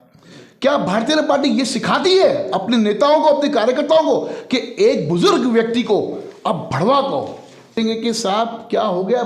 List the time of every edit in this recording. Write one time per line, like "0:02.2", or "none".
0:07.7